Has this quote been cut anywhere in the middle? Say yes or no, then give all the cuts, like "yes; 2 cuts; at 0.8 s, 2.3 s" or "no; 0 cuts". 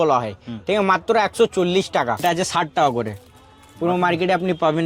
yes; 1 cut; at 2.2 s